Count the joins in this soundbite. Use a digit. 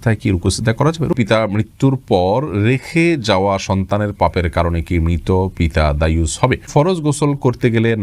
2